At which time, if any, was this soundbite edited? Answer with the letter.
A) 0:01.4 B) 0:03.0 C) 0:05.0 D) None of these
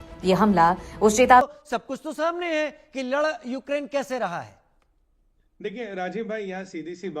A